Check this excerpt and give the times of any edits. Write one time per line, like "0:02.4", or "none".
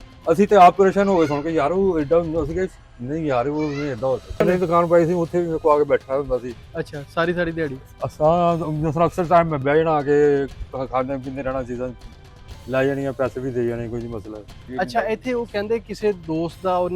0:04.4
0:14.7